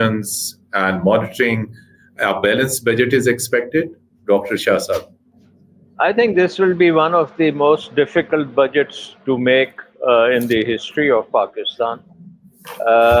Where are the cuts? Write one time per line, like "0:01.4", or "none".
none